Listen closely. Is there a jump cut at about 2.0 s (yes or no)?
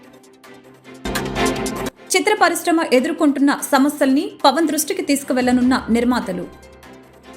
yes